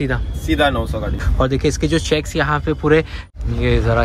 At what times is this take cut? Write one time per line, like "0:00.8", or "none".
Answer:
0:01.2
0:03.2